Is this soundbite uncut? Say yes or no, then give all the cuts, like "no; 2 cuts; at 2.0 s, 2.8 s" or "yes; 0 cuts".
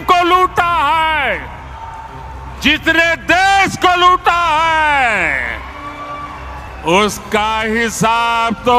yes; 0 cuts